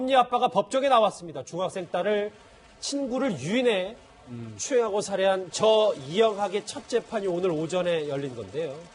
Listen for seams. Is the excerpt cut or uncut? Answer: uncut